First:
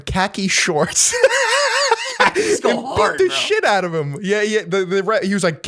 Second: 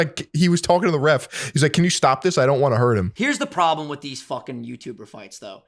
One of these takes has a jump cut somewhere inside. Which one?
second; 1 cut; at 3.1 s

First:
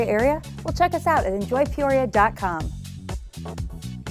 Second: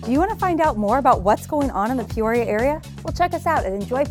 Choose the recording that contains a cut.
first; 1 cut; at 2.6 s

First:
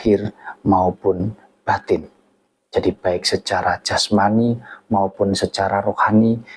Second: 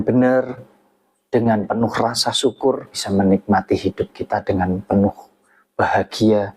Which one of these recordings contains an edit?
second; 1 cut; at 3.0 s

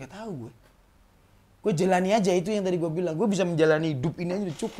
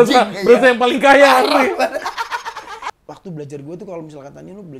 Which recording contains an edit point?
second; 1 cut; at 2.9 s

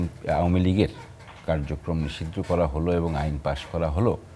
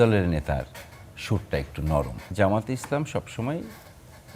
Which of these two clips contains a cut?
second; 1 cut; at 2.2 s

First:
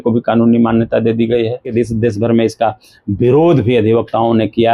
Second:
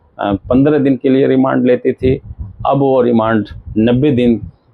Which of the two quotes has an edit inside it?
first; 1 cut; at 1.7 s

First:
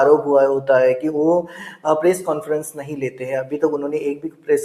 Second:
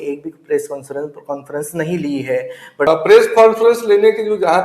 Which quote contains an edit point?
second; 1 cut; at 2.9 s

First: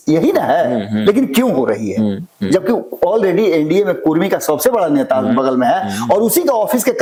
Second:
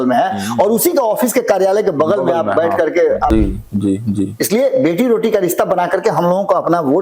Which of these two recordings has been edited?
second; 1 cut; at 3.3 s

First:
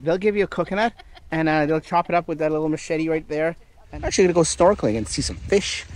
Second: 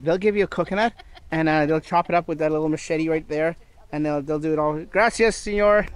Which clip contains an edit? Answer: first; 1 cut; at 3.8 s

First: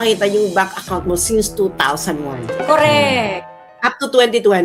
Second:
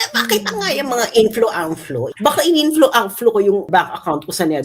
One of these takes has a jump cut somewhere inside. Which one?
second; 2 cuts; at 2.0 s, 3.6 s

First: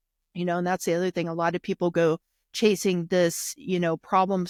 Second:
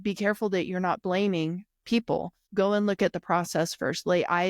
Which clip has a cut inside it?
second; 1 cut; at 2.4 s

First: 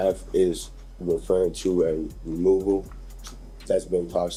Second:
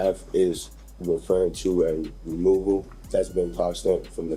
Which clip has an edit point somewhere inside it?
second; 1 cut; at 2.9 s

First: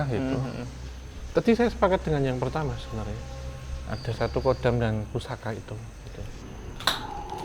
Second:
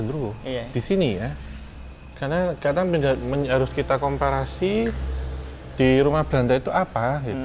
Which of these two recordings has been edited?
first; 1 cut; at 6.4 s

